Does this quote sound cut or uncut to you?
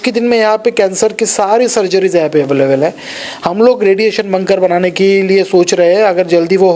uncut